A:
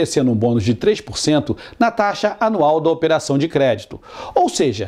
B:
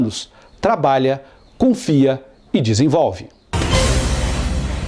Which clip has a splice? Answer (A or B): B